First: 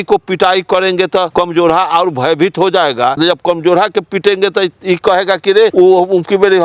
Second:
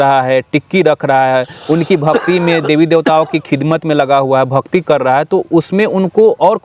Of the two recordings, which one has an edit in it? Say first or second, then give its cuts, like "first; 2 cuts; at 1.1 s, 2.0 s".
first; 3 cuts; at 1.3 s, 3.2 s, 5.7 s